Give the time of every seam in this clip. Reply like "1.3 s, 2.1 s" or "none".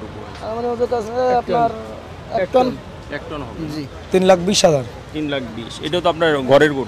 3.9 s